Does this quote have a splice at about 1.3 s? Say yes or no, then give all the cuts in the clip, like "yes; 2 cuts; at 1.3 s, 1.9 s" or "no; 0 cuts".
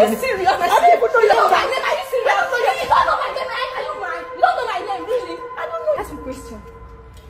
yes; 2 cuts; at 1.3 s, 6.0 s